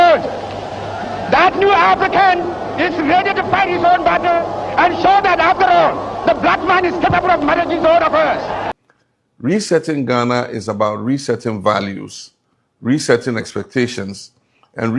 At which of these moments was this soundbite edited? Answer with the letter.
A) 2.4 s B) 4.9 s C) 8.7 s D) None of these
C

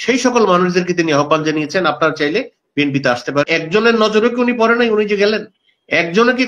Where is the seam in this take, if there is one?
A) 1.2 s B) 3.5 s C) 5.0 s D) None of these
B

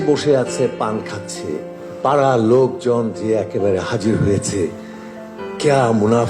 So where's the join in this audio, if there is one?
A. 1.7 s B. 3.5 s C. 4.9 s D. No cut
A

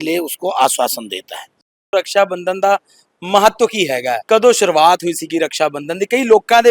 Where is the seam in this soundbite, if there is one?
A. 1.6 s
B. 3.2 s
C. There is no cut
C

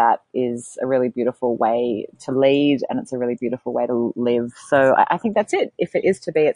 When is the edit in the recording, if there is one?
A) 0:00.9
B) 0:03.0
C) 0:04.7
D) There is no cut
D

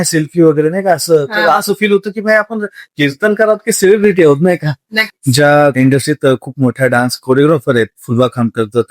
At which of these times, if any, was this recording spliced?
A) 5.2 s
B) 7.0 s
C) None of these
A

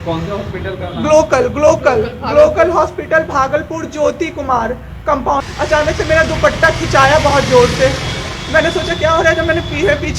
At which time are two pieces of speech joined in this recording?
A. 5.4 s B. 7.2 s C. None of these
A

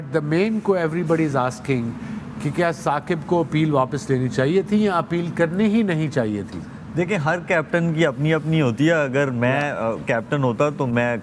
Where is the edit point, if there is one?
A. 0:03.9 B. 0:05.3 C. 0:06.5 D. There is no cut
D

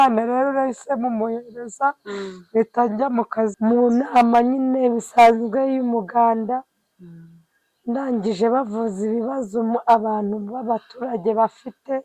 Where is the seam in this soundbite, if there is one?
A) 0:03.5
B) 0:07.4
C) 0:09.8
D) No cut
A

